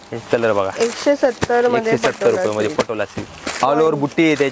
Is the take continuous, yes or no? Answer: no